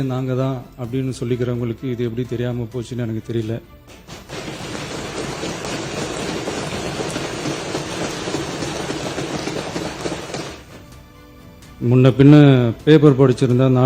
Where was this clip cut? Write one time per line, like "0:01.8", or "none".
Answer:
none